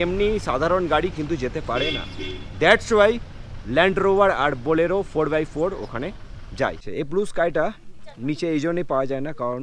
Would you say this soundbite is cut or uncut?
cut